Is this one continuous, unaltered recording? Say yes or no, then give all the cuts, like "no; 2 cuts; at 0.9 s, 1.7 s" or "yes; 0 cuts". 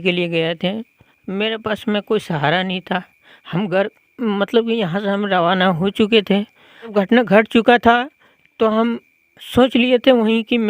no; 1 cut; at 6.9 s